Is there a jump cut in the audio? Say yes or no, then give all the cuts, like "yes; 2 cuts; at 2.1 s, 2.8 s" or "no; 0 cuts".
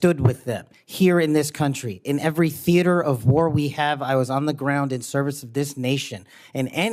no; 0 cuts